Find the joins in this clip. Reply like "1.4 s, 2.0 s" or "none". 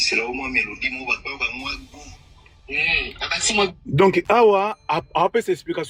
none

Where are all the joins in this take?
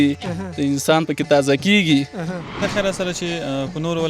2.6 s

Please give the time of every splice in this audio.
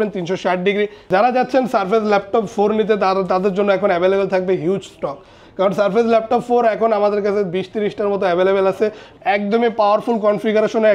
1.0 s, 9.1 s

